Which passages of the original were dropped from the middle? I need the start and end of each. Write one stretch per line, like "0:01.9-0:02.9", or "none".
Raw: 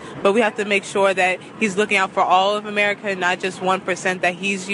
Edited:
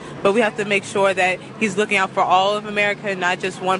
none